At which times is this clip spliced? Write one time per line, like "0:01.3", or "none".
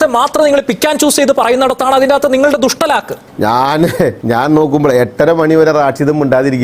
0:03.2
0:04.2